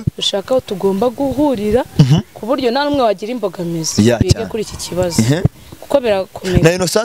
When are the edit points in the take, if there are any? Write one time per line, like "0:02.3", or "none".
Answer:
none